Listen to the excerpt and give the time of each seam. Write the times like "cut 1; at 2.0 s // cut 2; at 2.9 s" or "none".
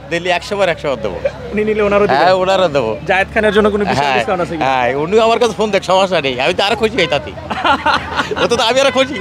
none